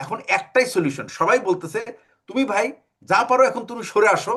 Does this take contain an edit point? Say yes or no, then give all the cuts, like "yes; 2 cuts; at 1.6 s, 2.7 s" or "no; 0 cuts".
no; 0 cuts